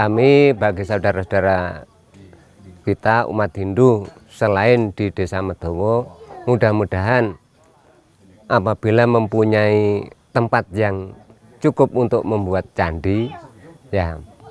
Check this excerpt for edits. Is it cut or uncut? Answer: uncut